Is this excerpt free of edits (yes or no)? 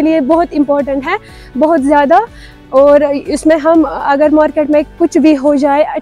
yes